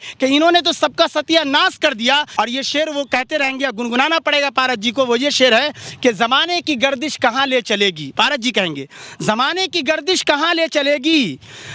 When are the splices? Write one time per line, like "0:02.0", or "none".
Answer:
0:02.3